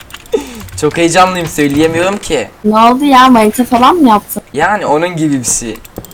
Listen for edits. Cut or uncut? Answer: cut